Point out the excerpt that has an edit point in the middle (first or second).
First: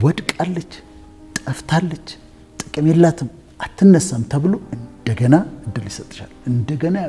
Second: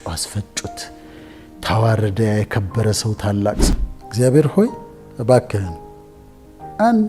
second